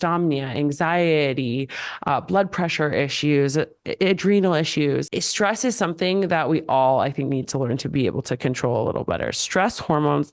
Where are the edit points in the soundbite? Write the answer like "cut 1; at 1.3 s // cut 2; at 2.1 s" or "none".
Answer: cut 1; at 5.0 s